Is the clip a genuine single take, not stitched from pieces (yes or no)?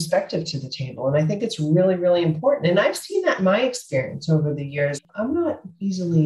no